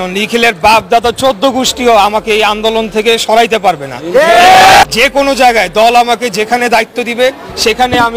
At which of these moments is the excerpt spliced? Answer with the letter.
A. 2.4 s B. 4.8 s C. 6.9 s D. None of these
B